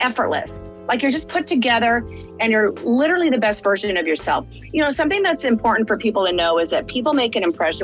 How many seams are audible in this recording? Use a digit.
0